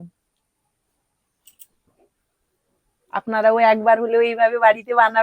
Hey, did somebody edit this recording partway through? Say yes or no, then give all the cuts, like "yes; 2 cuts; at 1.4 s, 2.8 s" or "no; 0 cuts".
no; 0 cuts